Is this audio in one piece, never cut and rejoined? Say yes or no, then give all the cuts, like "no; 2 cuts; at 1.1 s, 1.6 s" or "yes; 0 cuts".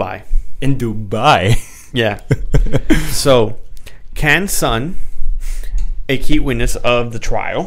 yes; 0 cuts